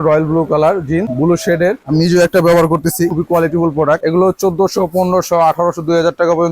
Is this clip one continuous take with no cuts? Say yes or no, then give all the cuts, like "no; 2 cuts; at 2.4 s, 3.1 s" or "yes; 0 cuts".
no; 3 cuts; at 1.5 s, 3.1 s, 4.0 s